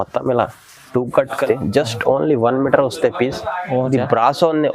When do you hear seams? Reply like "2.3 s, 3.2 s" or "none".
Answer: 1.4 s